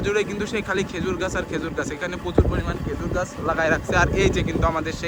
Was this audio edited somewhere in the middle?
no; 0 cuts

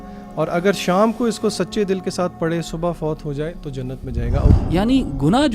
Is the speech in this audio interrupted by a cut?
yes; 1 cut; at 4.6 s

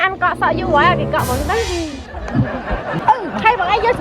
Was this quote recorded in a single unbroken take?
no; 1 cut; at 3.0 s

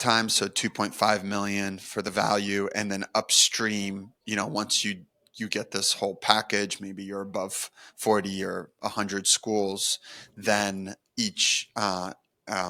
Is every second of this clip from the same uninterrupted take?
yes; 0 cuts

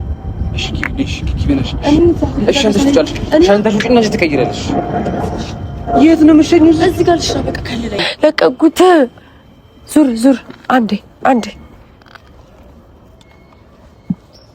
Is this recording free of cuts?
no; 1 cut; at 8.1 s

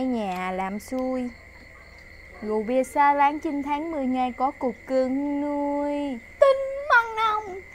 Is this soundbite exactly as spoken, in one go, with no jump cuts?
yes; 0 cuts

